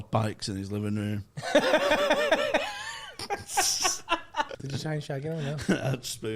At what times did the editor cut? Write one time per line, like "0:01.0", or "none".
0:04.5

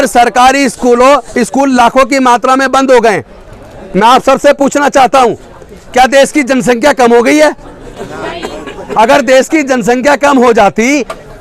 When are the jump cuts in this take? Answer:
none

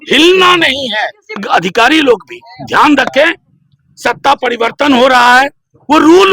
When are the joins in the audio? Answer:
0:01.4

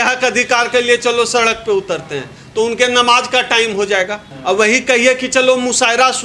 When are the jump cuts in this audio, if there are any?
0:04.3

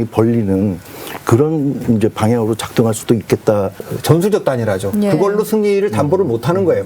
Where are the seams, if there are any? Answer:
0:03.9

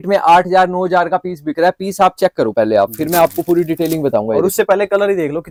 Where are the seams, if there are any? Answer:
none

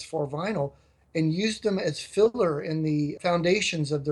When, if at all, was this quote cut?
0:03.2

